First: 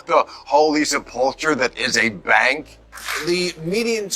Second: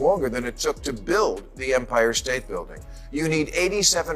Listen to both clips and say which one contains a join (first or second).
first